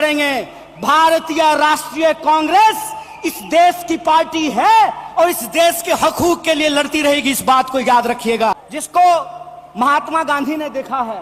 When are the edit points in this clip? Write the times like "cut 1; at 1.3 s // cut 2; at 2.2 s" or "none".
cut 1; at 8.7 s